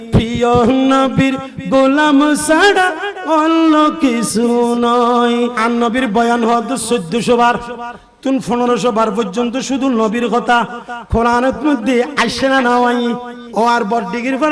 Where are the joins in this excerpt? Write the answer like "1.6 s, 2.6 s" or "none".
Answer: 5.6 s, 13.4 s